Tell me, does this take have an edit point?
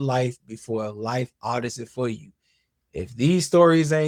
no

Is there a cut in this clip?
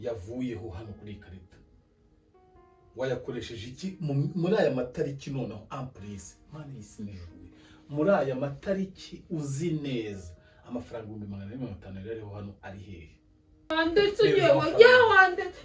yes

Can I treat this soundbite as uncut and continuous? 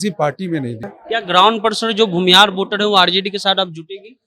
no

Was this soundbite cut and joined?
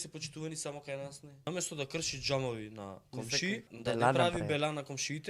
yes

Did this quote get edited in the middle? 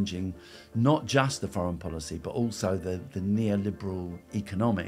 no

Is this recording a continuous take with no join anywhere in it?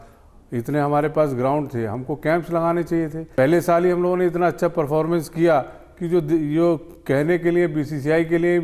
no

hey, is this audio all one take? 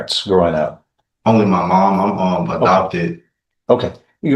yes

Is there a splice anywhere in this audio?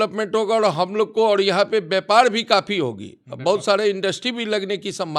no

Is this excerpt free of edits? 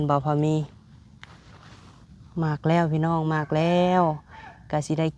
yes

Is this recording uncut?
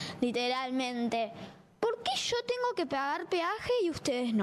no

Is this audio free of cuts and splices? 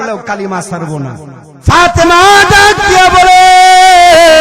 no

